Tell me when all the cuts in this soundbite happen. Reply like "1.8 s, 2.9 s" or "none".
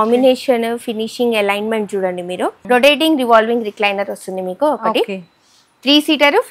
2.6 s